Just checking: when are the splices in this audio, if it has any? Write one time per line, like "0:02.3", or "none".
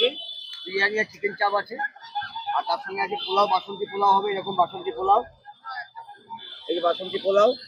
none